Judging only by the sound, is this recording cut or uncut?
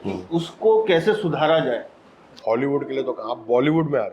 cut